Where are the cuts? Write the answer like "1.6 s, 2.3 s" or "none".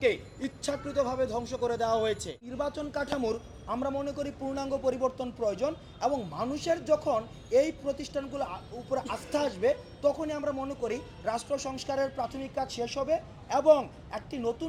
2.5 s

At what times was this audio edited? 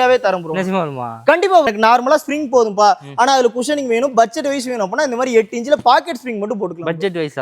1.7 s

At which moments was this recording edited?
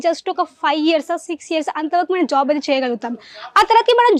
none

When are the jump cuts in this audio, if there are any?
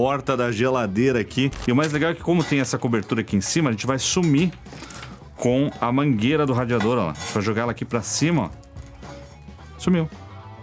1.6 s

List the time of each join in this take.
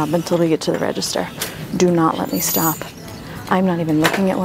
none

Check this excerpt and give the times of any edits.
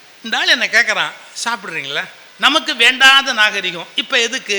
2.2 s

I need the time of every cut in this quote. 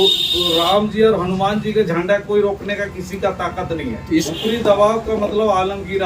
4.3 s

